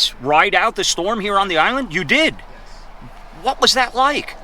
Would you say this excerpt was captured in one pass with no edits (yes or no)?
yes